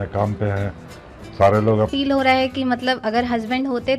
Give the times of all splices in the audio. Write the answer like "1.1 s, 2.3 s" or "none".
1.9 s